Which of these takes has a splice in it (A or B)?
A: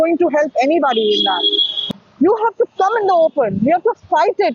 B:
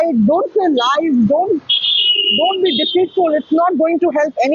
A